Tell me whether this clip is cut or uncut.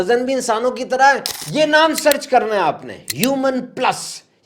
cut